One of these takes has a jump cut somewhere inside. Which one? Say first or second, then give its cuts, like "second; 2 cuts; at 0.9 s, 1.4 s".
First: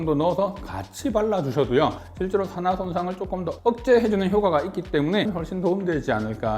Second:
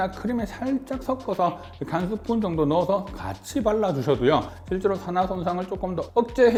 first; 1 cut; at 5.3 s